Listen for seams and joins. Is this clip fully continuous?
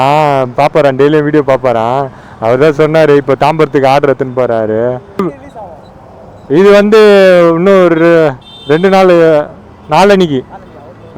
no; 1 cut; at 5.3 s

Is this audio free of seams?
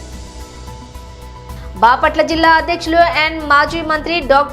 no; 1 cut; at 1.5 s

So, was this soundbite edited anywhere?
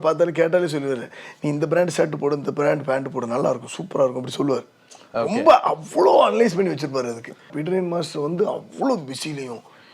yes; 1 cut; at 7.6 s

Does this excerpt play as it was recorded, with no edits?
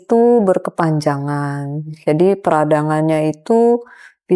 yes; 0 cuts

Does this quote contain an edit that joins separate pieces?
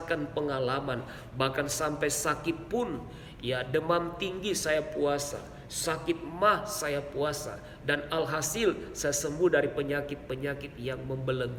no; 0 cuts

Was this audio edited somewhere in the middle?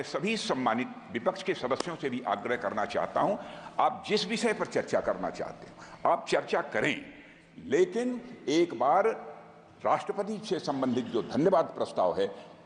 no; 0 cuts

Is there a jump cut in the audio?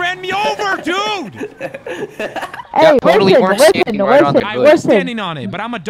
yes; 2 cuts; at 2.6 s, 4.4 s

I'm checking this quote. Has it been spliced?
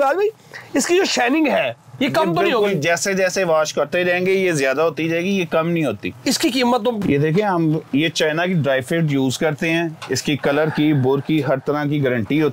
yes; 1 cut; at 7.0 s

